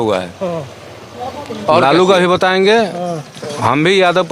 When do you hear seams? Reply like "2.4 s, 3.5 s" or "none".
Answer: 1.8 s